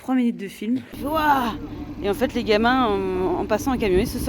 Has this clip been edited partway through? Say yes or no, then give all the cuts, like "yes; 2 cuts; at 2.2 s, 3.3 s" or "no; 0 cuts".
yes; 1 cut; at 1.0 s